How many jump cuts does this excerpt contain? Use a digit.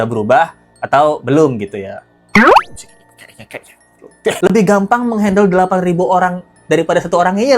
1